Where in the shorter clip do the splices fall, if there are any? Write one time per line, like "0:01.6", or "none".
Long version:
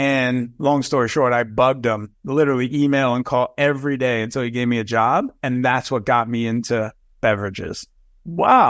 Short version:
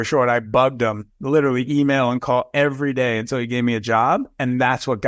none